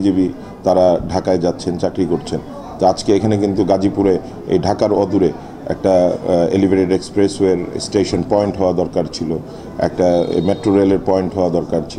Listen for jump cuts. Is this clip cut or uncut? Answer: uncut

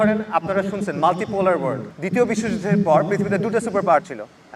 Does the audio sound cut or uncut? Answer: cut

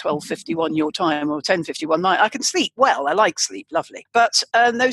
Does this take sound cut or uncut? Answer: cut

